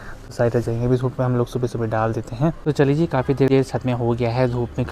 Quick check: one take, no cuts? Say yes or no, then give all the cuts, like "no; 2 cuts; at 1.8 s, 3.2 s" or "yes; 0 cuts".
yes; 0 cuts